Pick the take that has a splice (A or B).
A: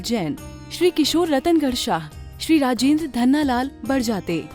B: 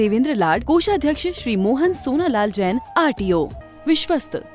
B